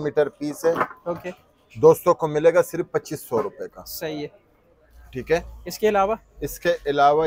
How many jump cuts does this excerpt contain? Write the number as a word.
zero